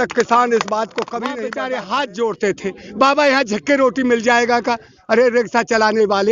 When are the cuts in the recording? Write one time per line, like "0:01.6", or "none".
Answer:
0:01.3